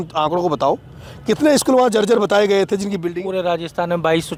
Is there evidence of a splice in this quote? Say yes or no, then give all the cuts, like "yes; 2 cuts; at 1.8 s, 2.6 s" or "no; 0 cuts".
no; 0 cuts